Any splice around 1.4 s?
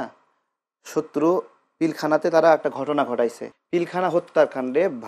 no; 1 cut; at 3.5 s

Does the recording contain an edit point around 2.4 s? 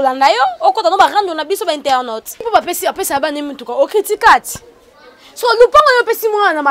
yes; 1 cut; at 2.4 s

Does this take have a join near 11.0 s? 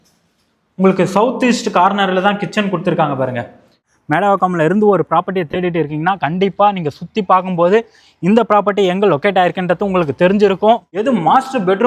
yes; 2 cuts; at 3.8 s, 11.0 s

